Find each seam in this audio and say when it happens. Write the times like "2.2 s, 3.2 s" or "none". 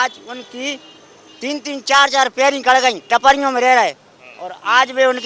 none